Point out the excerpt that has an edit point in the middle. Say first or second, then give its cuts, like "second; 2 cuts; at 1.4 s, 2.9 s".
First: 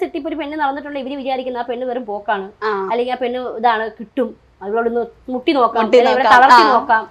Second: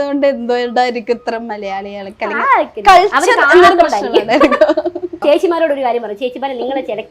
second; 1 cut; at 5.2 s